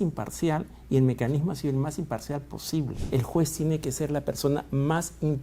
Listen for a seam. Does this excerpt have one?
yes; 1 cut; at 3.0 s

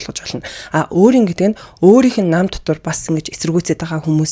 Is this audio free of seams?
yes; 0 cuts

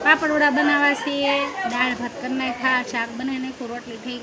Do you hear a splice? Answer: no; 0 cuts

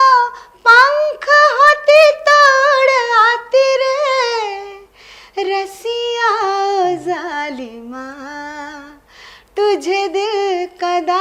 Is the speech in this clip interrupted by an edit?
no; 0 cuts

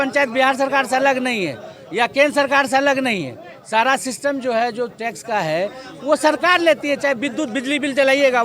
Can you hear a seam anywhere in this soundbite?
no; 0 cuts

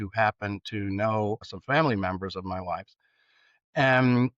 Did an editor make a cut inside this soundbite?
yes; 1 cut; at 1.5 s

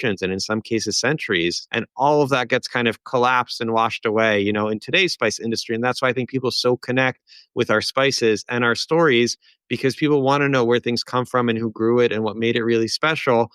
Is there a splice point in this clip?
yes; 1 cut; at 1.6 s

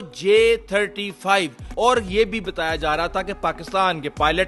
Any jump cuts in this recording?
yes; 1 cut; at 1.6 s

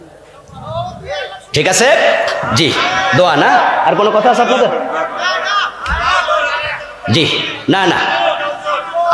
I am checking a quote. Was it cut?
no; 0 cuts

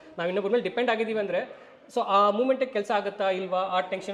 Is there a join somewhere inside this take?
no; 0 cuts

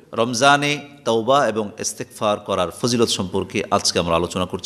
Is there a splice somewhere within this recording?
no; 0 cuts

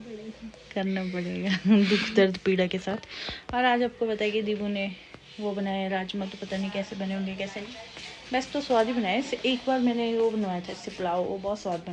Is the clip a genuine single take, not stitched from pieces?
yes; 0 cuts

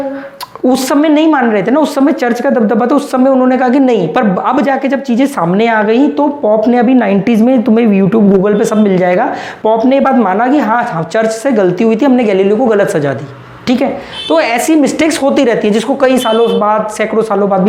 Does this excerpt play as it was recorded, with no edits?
yes; 0 cuts

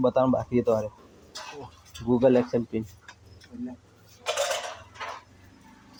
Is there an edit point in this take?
no; 0 cuts

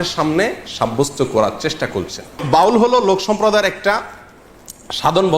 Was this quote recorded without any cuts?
no; 1 cut; at 2.4 s

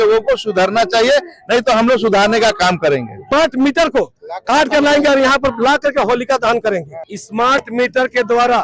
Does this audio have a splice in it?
yes; 2 cuts; at 3.1 s, 6.9 s

